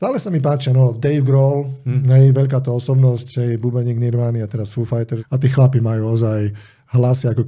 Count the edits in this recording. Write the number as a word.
one